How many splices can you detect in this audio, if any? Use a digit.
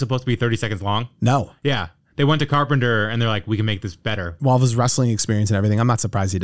1